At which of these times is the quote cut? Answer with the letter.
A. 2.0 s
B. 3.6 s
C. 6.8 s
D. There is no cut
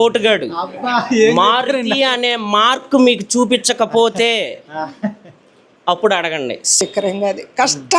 C